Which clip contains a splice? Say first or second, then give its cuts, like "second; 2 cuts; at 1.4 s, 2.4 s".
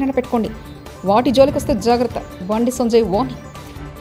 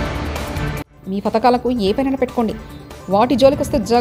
second; 1 cut; at 0.9 s